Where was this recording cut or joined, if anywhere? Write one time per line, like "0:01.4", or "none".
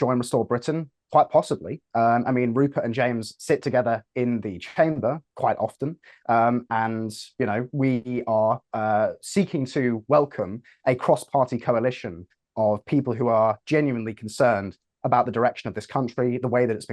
none